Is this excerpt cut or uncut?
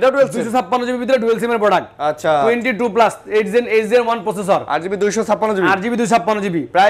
uncut